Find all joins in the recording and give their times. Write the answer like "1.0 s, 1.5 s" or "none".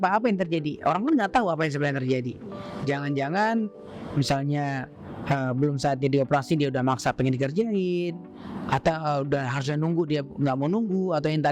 none

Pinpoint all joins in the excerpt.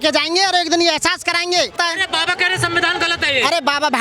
1.8 s

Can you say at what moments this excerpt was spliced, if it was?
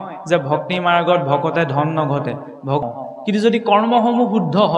2.8 s

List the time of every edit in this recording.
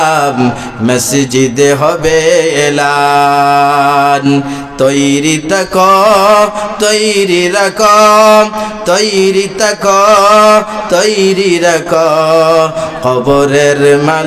none

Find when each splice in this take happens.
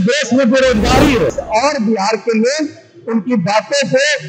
1.4 s

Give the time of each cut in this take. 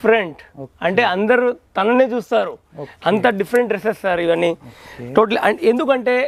none

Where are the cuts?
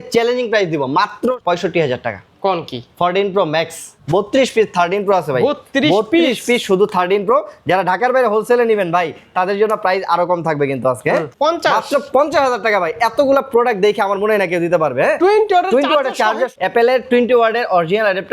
1.3 s, 3.9 s, 11.3 s, 16.5 s

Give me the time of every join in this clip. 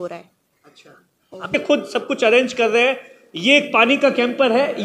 1.5 s

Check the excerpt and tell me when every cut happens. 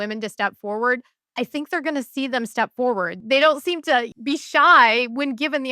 3.2 s, 4.1 s

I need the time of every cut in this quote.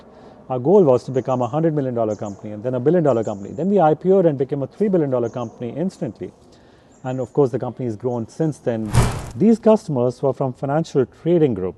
8.9 s

